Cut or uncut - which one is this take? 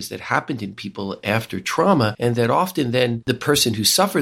cut